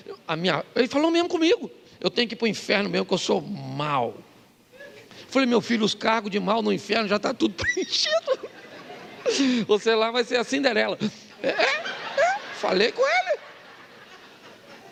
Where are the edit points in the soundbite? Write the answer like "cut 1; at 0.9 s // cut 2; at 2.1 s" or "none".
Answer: none